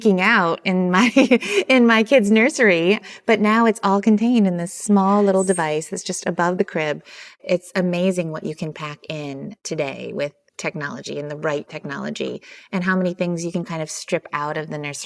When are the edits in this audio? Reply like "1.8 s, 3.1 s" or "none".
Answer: 7.4 s, 9.6 s